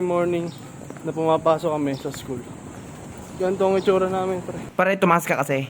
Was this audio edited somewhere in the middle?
yes; 1 cut; at 4.6 s

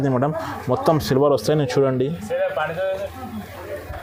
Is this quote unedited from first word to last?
yes; 0 cuts

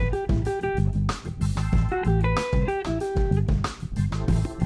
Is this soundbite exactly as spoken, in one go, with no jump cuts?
yes; 0 cuts

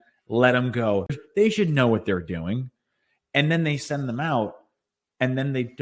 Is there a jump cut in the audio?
yes; 1 cut; at 1.1 s

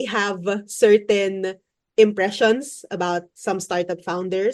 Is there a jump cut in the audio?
no; 0 cuts

